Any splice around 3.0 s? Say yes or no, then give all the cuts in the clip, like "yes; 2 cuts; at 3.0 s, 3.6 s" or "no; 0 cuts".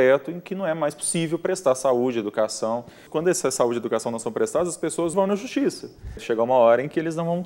yes; 3 cuts; at 3.0 s, 5.1 s, 6.2 s